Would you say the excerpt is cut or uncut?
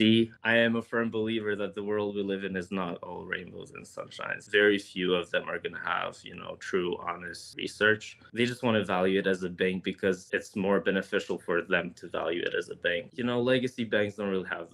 cut